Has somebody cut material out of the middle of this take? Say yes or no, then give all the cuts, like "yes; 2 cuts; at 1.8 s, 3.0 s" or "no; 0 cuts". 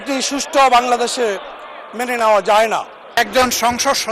yes; 1 cut; at 3.2 s